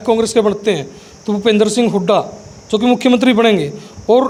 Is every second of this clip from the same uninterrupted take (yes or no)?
yes